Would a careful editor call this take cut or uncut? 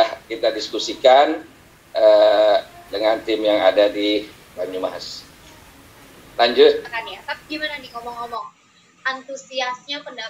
cut